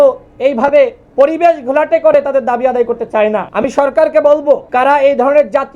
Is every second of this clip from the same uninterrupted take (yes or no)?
no